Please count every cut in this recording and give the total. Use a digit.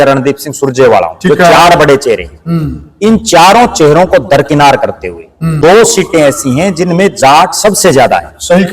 1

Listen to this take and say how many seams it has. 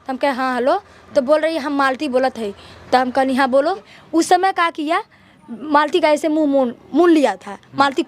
1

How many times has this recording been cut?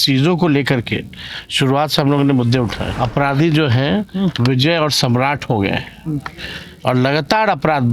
1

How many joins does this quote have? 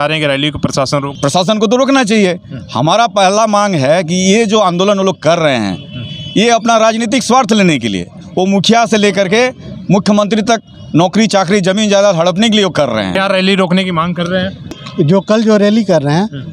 3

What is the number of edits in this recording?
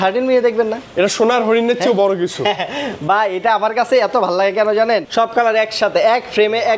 1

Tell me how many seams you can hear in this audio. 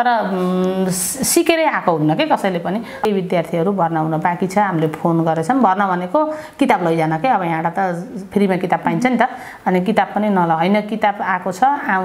1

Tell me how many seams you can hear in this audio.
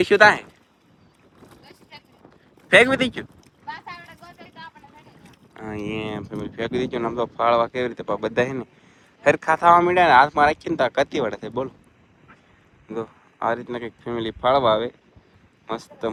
0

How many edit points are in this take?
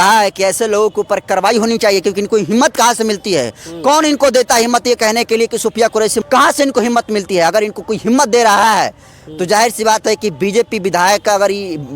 1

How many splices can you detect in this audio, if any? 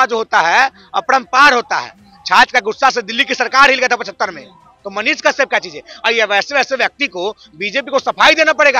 0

